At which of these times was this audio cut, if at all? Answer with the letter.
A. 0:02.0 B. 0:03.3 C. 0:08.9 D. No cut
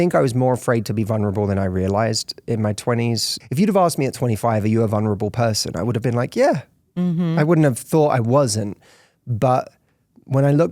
B